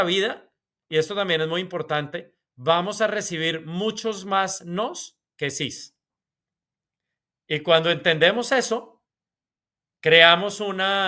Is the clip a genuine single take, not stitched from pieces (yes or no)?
yes